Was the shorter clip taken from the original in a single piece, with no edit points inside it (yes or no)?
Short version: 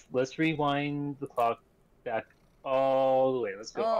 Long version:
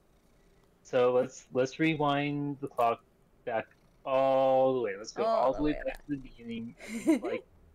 yes